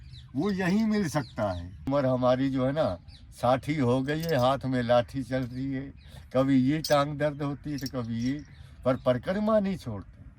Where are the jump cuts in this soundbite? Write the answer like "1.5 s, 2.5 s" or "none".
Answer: 1.9 s

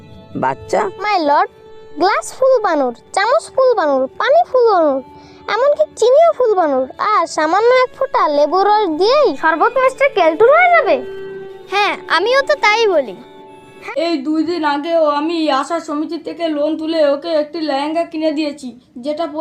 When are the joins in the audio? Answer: 1.0 s, 13.7 s

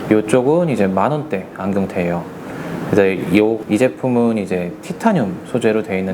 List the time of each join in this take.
3.6 s

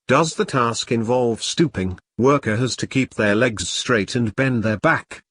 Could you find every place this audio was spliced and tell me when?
1.3 s

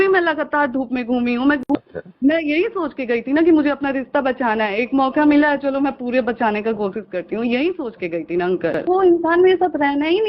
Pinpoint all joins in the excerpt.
1.6 s, 8.8 s

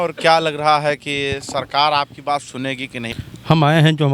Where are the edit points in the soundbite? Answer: 3.0 s

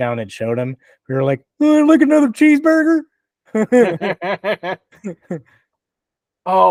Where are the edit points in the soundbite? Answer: none

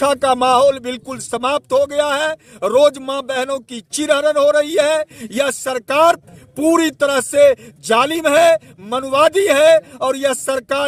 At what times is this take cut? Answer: none

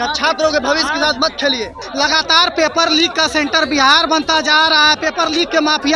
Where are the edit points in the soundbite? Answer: 1.8 s

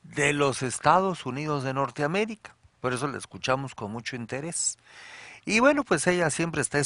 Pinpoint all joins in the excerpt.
none

